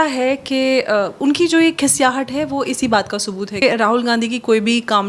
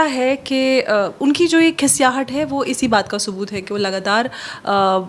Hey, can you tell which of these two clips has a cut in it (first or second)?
first